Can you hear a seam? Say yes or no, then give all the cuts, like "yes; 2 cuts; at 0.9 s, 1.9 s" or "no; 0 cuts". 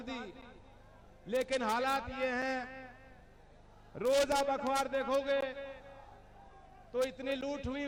no; 0 cuts